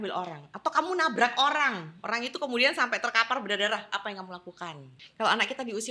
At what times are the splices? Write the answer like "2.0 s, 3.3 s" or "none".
4.9 s